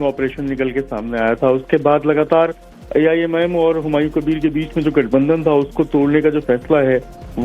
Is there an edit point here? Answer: yes; 1 cut; at 1.6 s

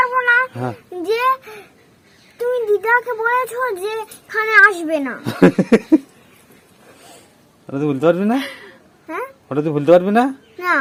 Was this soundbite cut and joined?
no; 0 cuts

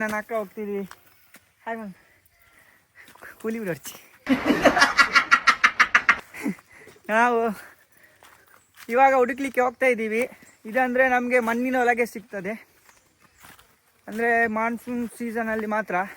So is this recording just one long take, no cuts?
no; 1 cut; at 6.2 s

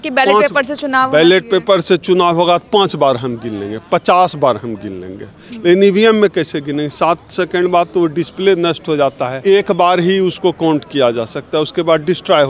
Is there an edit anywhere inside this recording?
yes; 1 cut; at 9.3 s

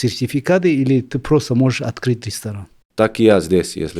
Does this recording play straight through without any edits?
no; 1 cut; at 2.8 s

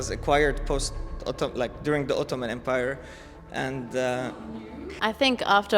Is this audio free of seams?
no; 1 cut; at 4.8 s

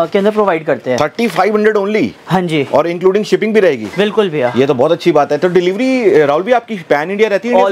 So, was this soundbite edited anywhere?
no; 0 cuts

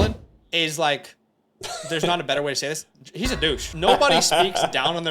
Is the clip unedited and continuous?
no; 1 cut; at 3.7 s

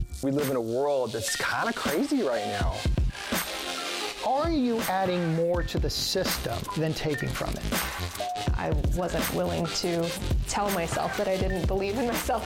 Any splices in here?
no; 0 cuts

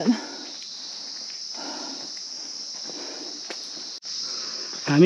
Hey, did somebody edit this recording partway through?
yes; 1 cut; at 4.1 s

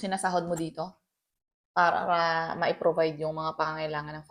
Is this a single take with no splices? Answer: yes; 0 cuts

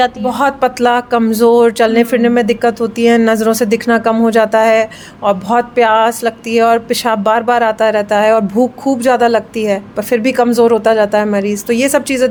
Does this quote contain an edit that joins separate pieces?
no; 0 cuts

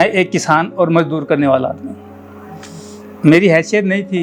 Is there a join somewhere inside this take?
no; 0 cuts

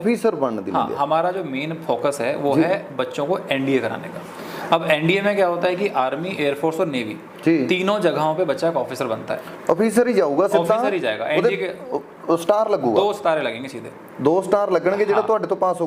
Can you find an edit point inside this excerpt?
no; 0 cuts

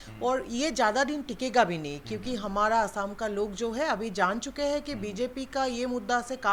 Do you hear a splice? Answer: no; 0 cuts

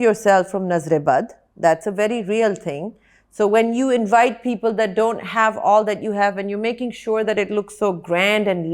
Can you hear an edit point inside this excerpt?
no; 0 cuts

